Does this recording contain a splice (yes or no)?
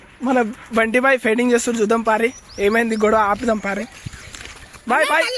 no